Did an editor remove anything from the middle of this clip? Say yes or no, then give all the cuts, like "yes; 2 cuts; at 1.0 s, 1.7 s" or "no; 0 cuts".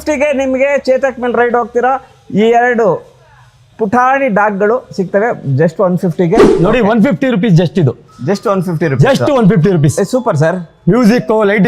yes; 1 cut; at 6.5 s